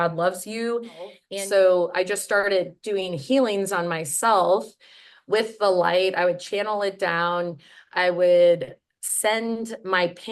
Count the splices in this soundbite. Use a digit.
1